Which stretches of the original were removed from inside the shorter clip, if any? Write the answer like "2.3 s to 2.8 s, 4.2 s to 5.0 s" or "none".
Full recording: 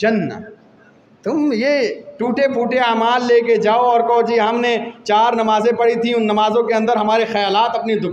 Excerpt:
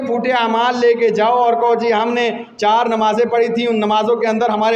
none